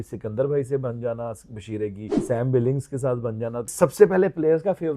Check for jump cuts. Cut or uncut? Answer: cut